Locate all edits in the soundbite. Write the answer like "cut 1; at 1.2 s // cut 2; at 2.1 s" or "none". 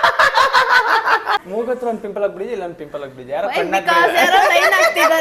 cut 1; at 1.5 s